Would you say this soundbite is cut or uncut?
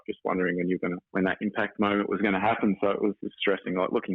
cut